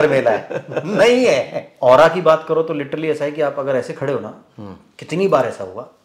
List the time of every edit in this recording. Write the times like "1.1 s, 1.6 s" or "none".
1.6 s